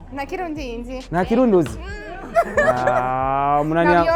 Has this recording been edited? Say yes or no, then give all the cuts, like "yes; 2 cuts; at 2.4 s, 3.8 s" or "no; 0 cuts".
no; 0 cuts